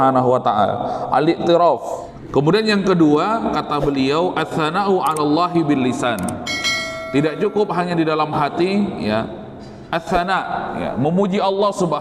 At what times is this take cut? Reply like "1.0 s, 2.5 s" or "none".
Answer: 1.8 s